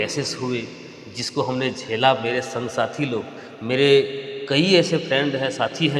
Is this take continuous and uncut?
yes; 0 cuts

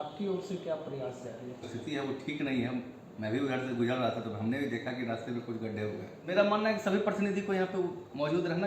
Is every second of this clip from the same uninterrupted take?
no; 2 cuts; at 1.7 s, 6.1 s

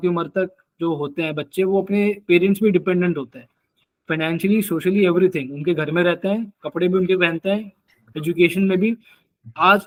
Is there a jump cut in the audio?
no; 0 cuts

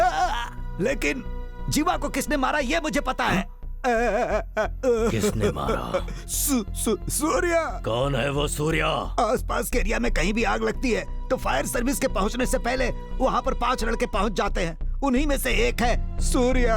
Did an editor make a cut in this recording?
no; 0 cuts

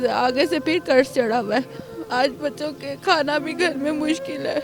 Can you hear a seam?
yes; 1 cut; at 1.8 s

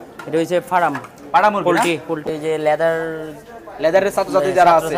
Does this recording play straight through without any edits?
no; 1 cut; at 2.2 s

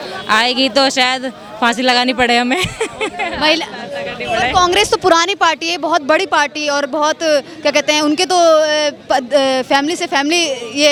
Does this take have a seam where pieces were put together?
no; 0 cuts

